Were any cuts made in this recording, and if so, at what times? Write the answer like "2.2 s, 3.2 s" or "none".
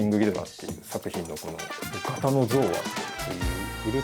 1.9 s